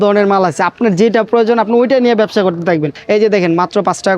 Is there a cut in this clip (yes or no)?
yes